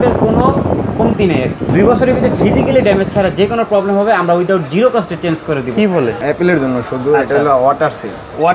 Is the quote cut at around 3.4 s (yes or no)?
no